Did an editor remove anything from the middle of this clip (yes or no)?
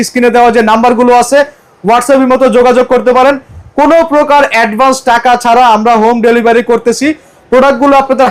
no